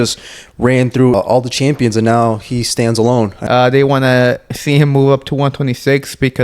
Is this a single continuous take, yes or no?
no